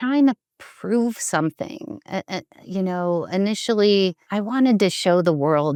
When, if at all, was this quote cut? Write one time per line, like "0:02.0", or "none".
none